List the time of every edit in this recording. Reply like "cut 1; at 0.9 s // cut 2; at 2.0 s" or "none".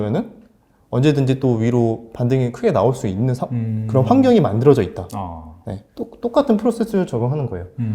none

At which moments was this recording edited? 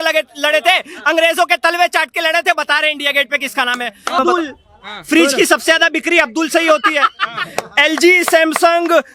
cut 1; at 4.2 s

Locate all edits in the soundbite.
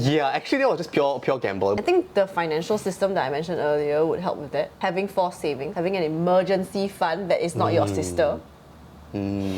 cut 1; at 1.7 s // cut 2; at 5.7 s

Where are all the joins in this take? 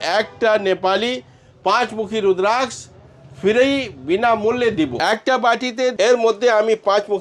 cut 1; at 4.9 s // cut 2; at 5.9 s

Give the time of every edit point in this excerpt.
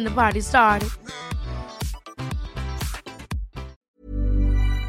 cut 1; at 3.8 s

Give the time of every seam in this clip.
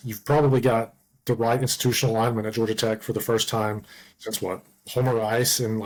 none

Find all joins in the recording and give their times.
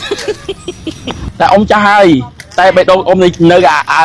cut 1; at 1.2 s

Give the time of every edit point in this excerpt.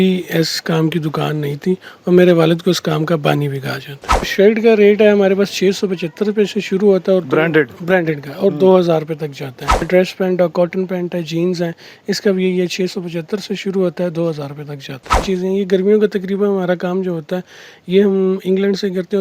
cut 1; at 4.3 s // cut 2; at 9.9 s // cut 3; at 15.2 s

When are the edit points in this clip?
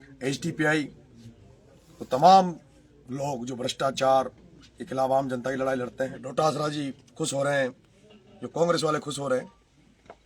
cut 1; at 6.2 s

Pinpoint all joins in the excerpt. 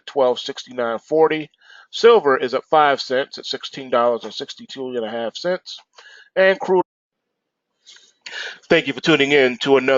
none

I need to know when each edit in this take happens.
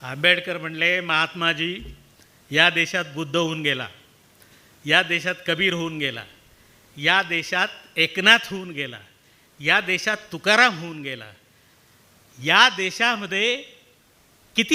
none

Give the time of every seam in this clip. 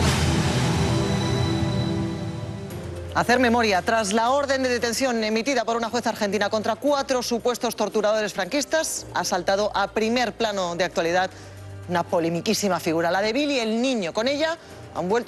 cut 1; at 11.5 s

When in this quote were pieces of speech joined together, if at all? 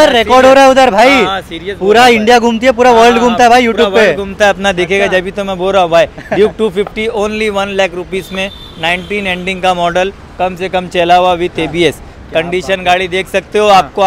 none

